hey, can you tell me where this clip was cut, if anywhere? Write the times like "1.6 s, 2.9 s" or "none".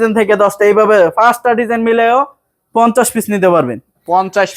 none